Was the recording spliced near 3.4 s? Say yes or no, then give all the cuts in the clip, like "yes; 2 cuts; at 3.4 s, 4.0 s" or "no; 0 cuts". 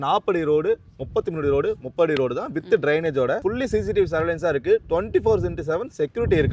yes; 1 cut; at 3.4 s